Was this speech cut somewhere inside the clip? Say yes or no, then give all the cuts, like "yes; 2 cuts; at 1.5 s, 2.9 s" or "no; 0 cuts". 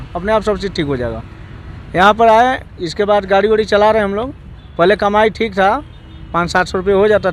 no; 0 cuts